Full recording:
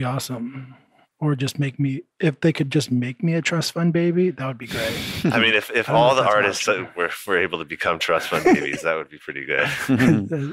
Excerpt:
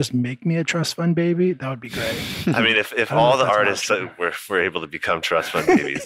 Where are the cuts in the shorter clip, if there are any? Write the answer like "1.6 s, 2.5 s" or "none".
none